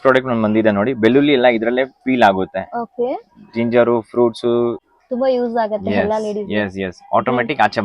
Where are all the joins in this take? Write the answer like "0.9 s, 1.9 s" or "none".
4.9 s